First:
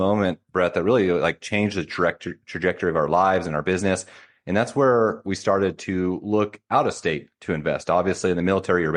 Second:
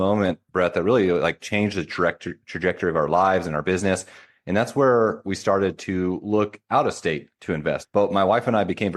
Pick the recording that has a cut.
second; 1 cut; at 7.8 s

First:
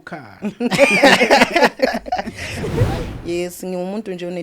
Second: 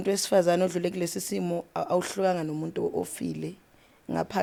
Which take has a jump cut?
first; 1 cut; at 2.7 s

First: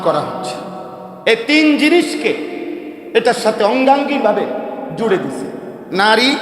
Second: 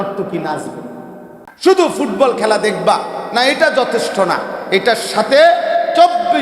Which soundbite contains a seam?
second; 1 cut; at 1.5 s

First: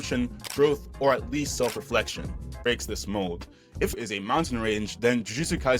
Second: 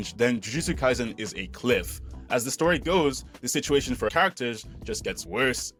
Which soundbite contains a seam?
first; 1 cut; at 2.5 s

